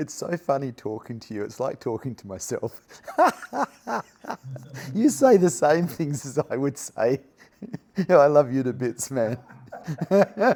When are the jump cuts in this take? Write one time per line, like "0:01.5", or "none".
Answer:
none